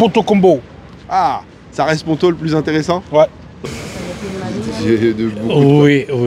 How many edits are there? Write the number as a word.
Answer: one